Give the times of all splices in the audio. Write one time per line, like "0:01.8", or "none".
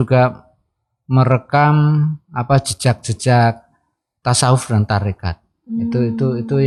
none